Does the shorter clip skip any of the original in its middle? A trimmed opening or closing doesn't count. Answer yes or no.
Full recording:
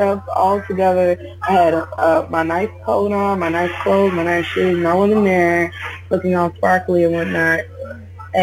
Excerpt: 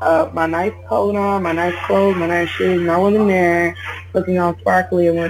no